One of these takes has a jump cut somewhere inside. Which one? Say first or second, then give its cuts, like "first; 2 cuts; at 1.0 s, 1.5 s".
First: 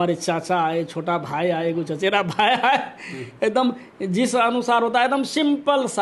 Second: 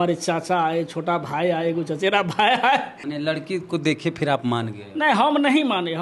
second; 1 cut; at 3.0 s